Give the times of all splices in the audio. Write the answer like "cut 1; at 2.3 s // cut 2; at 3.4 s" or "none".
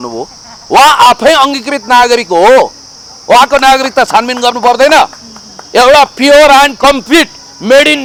none